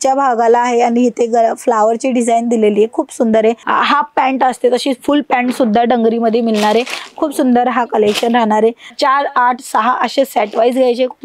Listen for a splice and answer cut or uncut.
cut